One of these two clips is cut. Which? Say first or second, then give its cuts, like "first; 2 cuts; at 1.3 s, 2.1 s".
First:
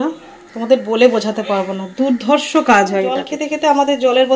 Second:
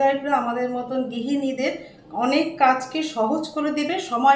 first; 1 cut; at 3.4 s